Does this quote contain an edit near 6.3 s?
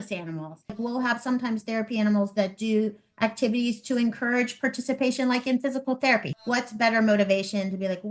yes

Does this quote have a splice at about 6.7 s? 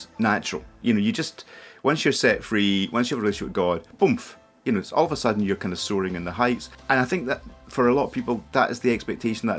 yes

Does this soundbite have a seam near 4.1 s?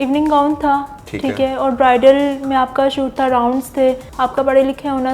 yes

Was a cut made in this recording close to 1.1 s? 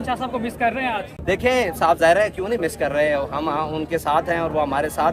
yes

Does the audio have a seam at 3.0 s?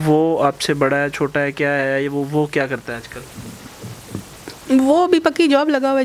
no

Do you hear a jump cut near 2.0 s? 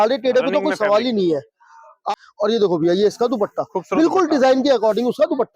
yes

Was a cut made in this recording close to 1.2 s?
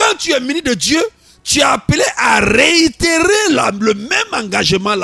no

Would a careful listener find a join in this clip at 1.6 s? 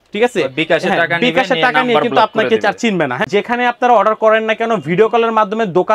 no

